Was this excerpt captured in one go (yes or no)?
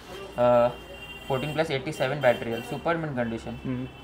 yes